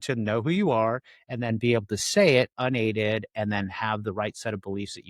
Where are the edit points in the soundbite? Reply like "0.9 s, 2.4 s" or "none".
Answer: 2.5 s